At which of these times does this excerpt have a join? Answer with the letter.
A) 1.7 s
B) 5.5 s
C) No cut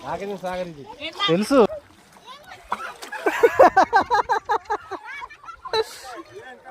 A